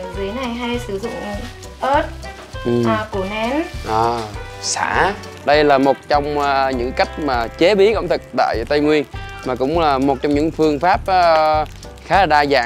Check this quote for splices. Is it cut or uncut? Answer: cut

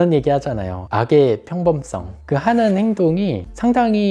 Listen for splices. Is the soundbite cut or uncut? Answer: uncut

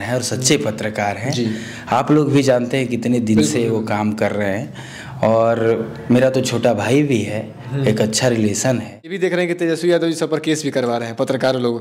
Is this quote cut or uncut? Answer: cut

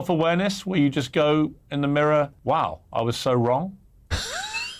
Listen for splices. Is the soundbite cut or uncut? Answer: cut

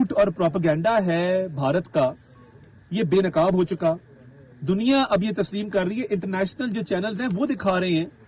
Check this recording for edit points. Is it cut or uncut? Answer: uncut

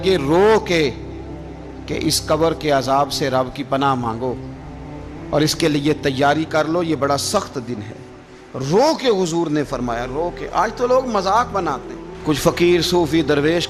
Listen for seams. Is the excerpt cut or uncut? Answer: uncut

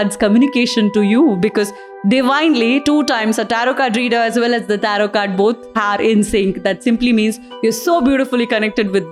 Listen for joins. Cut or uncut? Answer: uncut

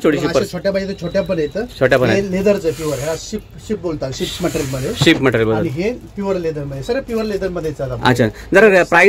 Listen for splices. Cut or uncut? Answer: uncut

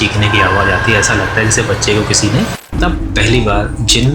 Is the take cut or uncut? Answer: cut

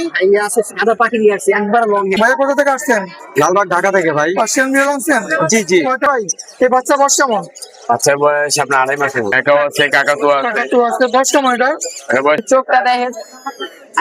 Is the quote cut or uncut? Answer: cut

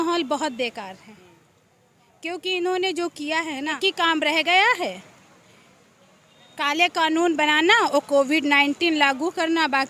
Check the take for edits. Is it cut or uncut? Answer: cut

